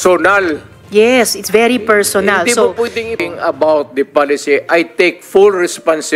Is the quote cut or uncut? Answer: cut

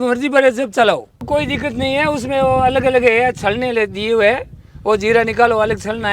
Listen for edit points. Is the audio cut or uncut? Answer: cut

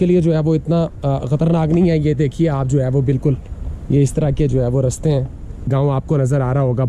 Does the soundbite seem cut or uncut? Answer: cut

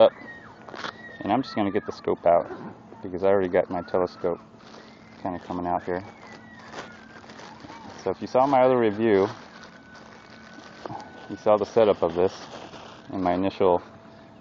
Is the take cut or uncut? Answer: uncut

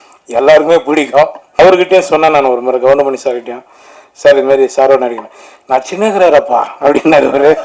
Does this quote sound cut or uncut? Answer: cut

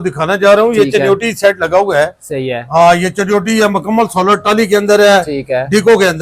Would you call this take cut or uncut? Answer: uncut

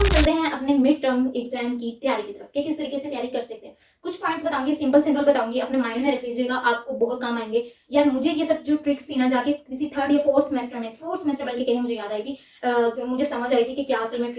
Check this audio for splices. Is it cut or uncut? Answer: uncut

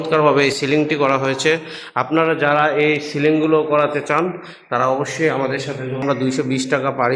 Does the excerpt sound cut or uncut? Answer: cut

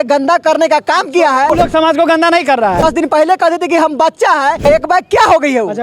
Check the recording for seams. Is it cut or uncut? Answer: cut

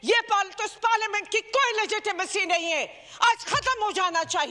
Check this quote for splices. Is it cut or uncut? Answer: uncut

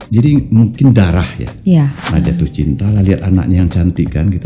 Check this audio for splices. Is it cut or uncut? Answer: cut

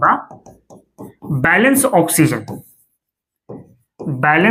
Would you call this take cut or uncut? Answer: uncut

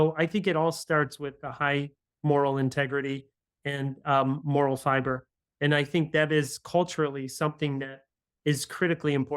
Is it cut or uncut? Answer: uncut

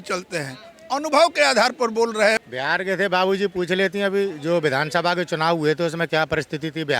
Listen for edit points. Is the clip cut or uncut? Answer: cut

